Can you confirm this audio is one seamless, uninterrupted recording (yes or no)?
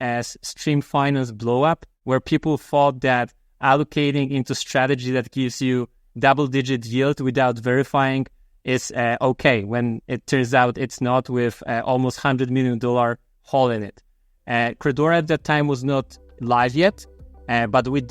no